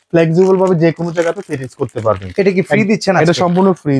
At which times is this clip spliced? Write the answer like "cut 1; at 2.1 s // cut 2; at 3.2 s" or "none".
none